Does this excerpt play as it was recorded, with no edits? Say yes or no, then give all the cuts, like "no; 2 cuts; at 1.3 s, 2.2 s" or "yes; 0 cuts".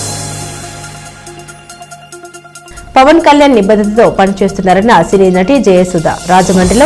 yes; 0 cuts